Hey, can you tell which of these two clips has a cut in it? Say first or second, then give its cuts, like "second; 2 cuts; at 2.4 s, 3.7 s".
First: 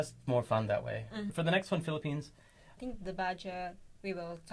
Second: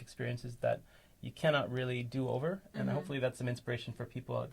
first; 2 cuts; at 1.3 s, 2.7 s